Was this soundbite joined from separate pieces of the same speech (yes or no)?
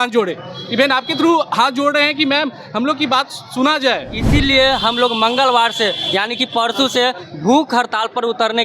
yes